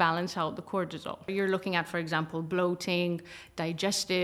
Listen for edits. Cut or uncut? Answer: cut